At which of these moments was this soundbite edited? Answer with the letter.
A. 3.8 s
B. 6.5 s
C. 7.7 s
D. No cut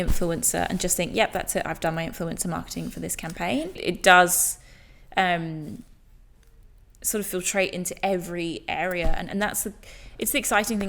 A